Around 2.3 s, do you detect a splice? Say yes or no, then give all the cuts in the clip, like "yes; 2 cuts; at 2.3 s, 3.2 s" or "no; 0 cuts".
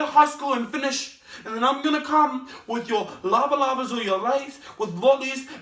no; 0 cuts